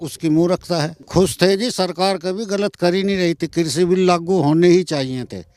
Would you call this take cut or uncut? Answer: cut